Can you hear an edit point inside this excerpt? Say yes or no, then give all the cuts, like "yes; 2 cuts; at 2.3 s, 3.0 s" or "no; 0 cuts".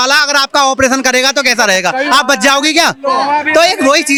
no; 0 cuts